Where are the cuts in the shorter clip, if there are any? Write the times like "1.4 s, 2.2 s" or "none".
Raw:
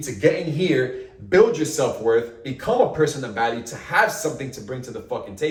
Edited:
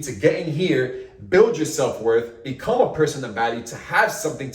none